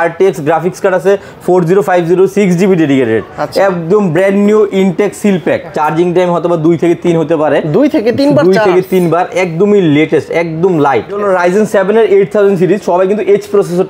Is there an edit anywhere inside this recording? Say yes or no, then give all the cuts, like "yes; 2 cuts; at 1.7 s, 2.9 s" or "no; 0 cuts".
yes; 2 cuts; at 5.7 s, 11.2 s